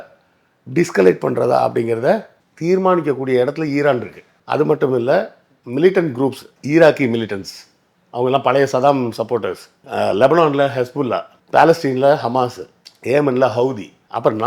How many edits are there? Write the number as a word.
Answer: zero